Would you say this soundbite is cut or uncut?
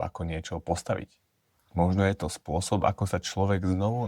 uncut